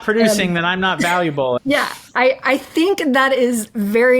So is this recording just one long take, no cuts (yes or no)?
no